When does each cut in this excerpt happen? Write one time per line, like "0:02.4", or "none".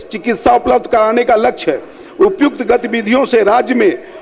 none